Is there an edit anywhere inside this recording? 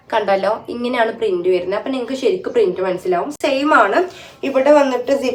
no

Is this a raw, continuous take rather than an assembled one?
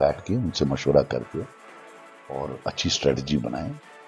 yes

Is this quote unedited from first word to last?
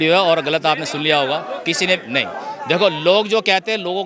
yes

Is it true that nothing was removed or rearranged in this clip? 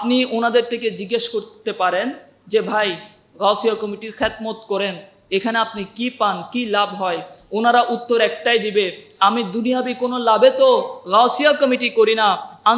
yes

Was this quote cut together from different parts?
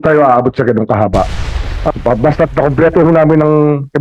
yes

